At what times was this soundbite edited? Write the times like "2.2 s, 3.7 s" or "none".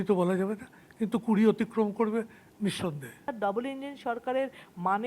3.3 s